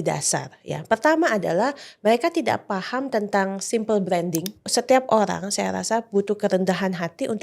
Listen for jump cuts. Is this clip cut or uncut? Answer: cut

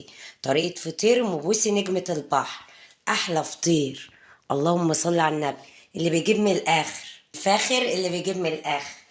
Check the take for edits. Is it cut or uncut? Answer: uncut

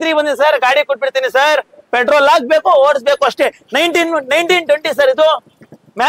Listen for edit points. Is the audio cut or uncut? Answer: uncut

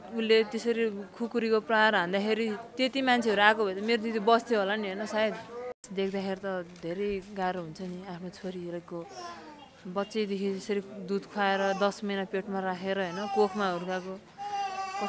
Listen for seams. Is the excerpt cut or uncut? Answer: cut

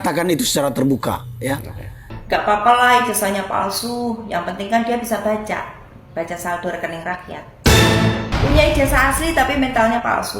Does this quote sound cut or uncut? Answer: cut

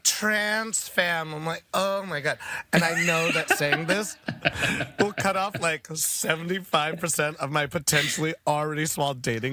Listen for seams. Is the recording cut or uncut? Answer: uncut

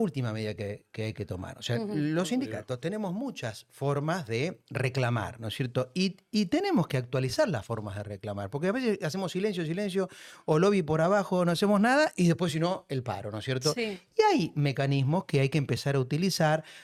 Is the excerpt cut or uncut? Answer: uncut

